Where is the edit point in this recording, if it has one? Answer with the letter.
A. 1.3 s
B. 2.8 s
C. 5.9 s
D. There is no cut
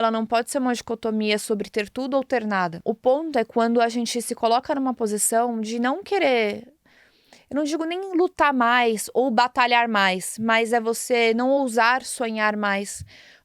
B